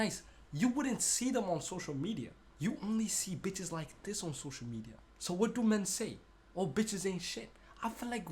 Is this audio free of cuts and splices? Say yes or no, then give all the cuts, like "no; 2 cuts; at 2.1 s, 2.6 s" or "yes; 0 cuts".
no; 2 cuts; at 2.4 s, 5.0 s